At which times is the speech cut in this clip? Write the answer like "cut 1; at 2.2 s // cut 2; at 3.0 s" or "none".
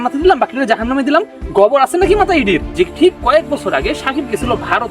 cut 1; at 2.7 s

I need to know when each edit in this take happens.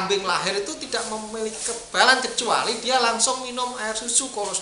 none

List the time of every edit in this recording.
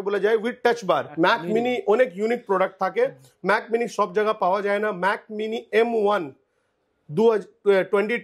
cut 1; at 1.1 s

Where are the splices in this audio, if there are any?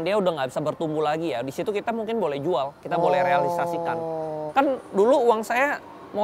cut 1; at 4.4 s

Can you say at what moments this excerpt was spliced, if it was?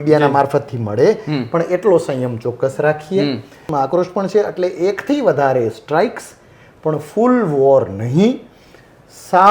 cut 1; at 3.7 s

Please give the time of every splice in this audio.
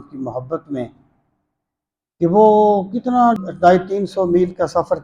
cut 1; at 3.4 s

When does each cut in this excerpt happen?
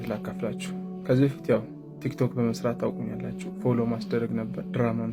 none

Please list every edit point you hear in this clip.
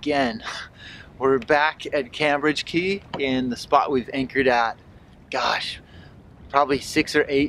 none

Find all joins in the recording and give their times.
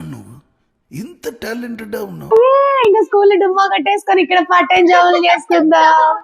cut 1; at 2.3 s

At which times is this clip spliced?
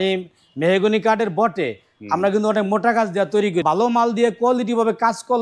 cut 1; at 3.6 s

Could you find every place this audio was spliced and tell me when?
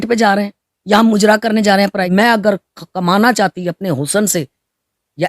cut 1; at 2.1 s

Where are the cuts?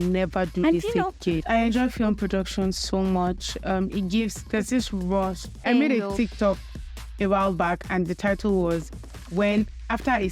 cut 1; at 1.4 s // cut 2; at 5.5 s

